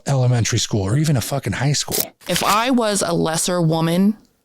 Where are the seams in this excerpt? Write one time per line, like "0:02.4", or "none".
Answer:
0:02.1